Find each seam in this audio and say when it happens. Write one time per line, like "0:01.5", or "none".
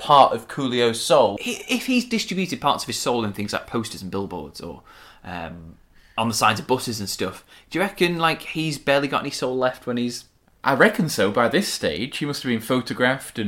0:01.4